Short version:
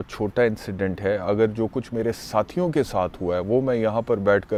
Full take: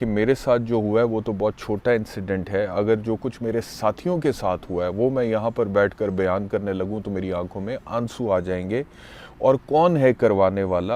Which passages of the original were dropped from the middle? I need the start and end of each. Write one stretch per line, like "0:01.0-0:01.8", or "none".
none

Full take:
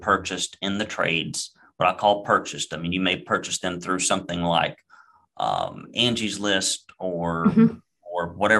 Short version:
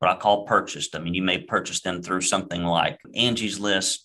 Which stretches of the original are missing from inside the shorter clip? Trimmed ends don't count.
0:04.8-0:05.8

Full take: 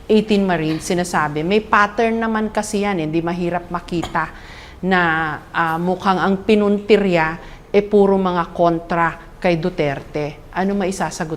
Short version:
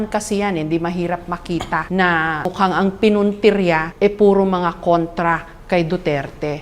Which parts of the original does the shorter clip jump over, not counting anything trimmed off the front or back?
0:04.3-0:04.8
0:05.4-0:05.9
0:07.3-0:07.6

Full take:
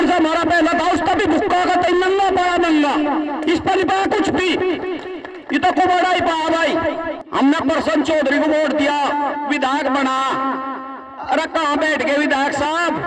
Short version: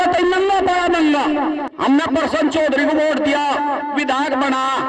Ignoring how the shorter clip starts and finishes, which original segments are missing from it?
0:03.3-0:07.2

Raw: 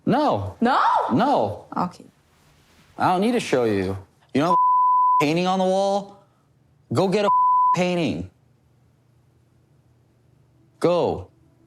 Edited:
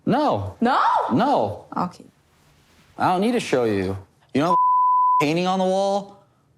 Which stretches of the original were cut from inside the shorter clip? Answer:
none

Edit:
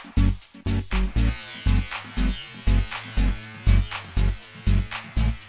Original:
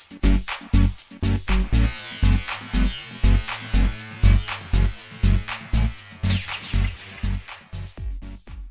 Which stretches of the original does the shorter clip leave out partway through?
none

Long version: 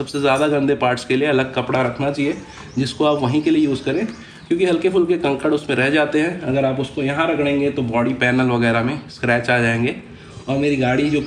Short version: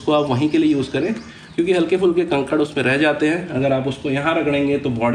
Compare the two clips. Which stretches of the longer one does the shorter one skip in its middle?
none

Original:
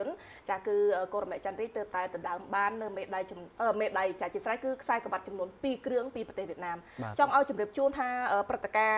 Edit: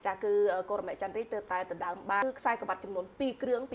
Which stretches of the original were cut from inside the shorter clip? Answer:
0:02.7-0:04.7

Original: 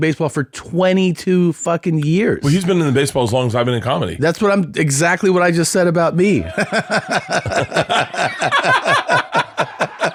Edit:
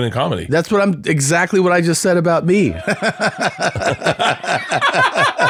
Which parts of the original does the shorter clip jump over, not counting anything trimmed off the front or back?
none

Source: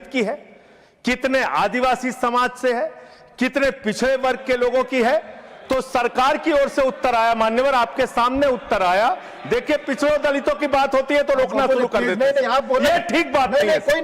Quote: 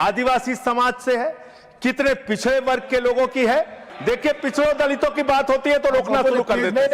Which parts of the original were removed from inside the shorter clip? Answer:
0:05.4-0:09.3

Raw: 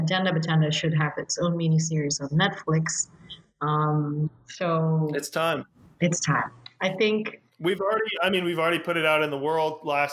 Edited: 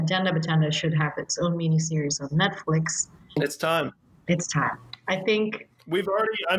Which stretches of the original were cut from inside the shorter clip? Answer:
0:03.4-0:05.1

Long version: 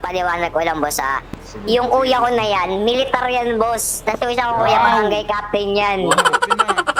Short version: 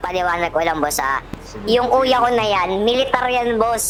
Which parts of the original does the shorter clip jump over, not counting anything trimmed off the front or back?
none

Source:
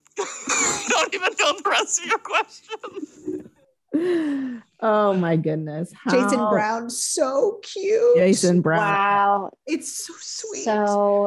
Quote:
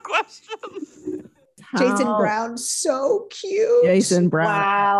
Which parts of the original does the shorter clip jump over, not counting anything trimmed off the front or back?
0:03.7-0:05.8

